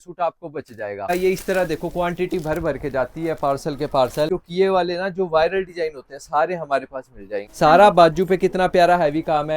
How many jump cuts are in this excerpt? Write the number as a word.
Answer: three